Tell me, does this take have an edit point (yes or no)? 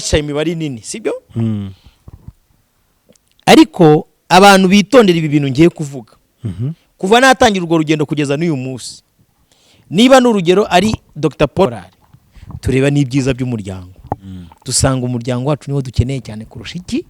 yes